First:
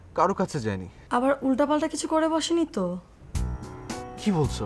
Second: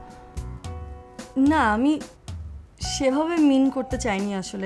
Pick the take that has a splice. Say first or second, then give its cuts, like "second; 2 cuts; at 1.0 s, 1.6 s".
first; 1 cut; at 0.9 s